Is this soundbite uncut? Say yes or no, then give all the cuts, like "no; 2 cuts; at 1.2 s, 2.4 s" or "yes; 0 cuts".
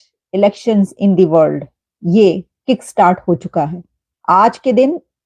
yes; 0 cuts